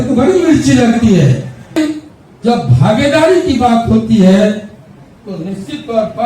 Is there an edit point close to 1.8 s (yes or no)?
yes